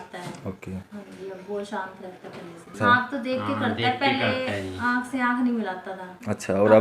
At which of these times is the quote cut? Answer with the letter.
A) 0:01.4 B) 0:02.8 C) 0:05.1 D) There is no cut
B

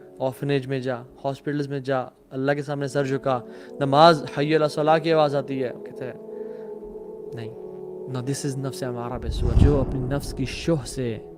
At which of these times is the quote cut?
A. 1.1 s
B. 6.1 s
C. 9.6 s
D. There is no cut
C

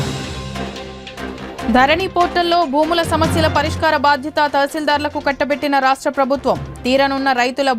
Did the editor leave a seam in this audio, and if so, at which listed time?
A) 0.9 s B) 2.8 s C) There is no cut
A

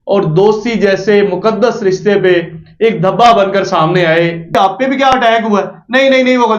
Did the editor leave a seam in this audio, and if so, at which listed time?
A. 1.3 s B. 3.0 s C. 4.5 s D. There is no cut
C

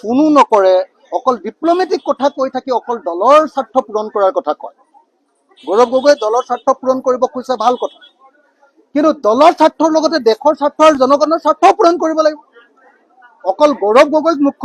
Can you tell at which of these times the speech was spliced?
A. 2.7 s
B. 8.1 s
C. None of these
C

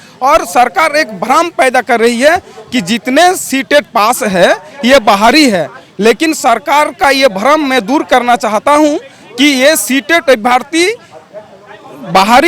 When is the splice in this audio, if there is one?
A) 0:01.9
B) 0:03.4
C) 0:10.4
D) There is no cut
D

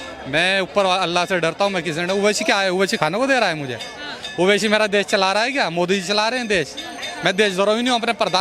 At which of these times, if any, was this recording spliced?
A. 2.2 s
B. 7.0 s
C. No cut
B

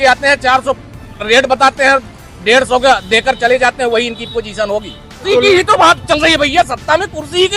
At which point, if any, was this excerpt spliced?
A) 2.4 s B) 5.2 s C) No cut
B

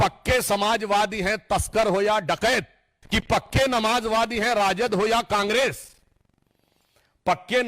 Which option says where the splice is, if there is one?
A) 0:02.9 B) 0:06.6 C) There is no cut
A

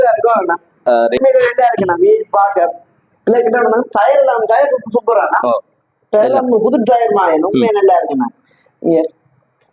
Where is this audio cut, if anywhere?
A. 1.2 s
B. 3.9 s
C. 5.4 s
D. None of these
A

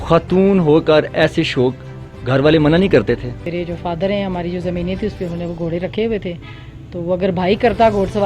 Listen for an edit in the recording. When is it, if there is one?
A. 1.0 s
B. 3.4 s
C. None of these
B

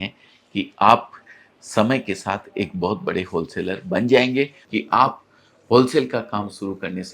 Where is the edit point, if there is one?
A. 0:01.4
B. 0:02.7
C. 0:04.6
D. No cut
C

